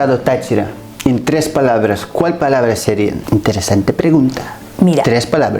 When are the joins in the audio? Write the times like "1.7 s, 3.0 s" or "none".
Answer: none